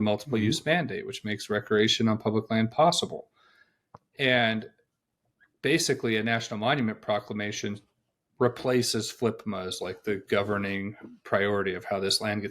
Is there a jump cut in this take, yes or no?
no